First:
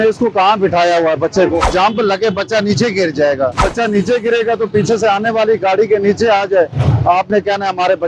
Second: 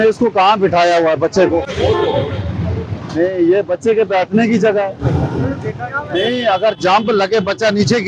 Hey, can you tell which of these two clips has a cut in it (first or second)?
first